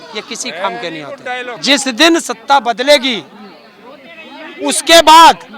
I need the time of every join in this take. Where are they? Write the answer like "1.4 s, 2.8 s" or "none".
1.5 s

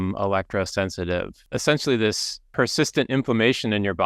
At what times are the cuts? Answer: 1.4 s, 2.3 s

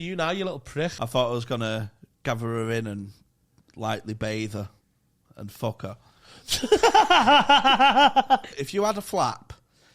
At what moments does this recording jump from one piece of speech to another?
1.0 s, 8.6 s

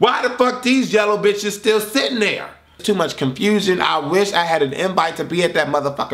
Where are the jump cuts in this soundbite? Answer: 2.8 s

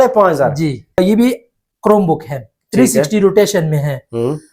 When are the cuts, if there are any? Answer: 1.0 s

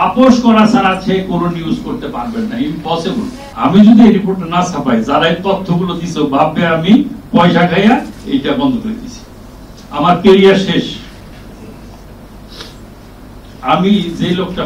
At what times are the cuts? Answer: 3.4 s

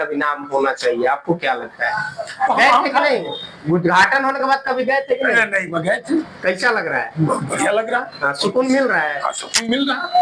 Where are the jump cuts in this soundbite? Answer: 2.5 s

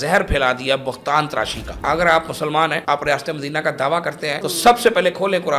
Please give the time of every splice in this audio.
1.7 s, 2.8 s, 4.4 s

